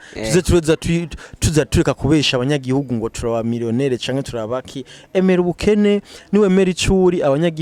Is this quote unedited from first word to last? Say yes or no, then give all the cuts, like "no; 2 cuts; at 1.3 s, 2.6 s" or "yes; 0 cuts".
yes; 0 cuts